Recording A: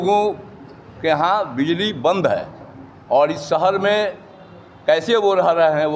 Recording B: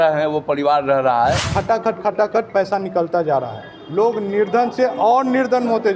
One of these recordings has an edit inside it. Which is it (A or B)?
B